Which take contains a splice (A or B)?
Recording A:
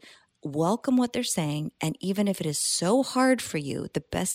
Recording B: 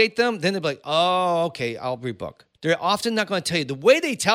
B